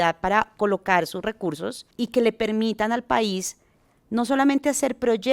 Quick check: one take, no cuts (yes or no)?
no